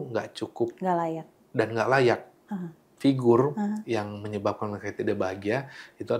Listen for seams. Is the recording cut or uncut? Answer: cut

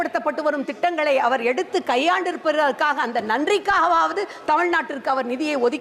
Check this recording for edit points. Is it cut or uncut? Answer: uncut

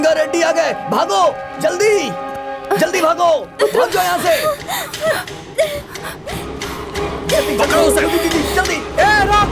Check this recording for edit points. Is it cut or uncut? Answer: cut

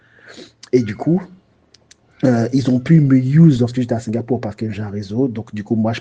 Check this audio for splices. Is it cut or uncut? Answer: uncut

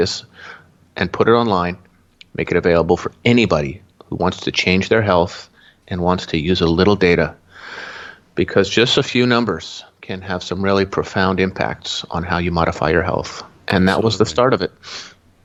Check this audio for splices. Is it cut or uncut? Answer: uncut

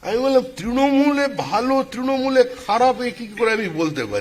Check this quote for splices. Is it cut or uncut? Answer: uncut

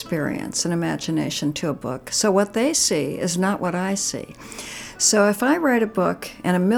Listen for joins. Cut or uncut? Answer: uncut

